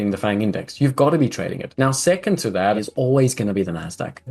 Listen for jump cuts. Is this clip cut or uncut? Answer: cut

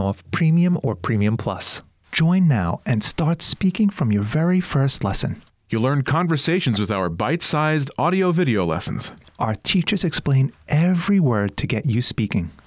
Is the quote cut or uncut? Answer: cut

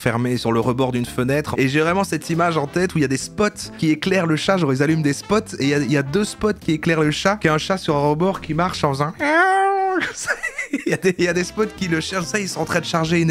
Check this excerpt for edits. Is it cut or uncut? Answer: cut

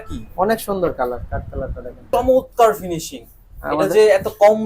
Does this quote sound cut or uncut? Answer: cut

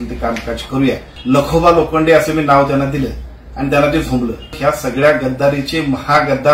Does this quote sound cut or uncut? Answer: cut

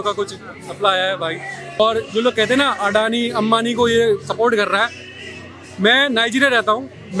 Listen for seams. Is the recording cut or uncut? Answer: cut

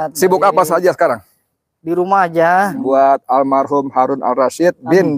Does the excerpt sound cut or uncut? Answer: cut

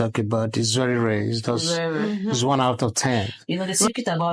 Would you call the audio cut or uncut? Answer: cut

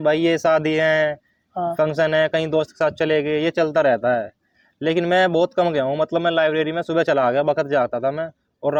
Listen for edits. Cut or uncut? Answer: uncut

